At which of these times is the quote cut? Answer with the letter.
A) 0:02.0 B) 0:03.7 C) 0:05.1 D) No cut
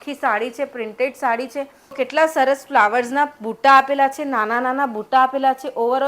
A